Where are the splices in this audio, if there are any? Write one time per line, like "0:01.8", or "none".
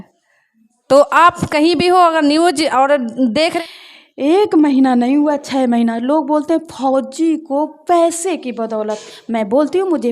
0:03.6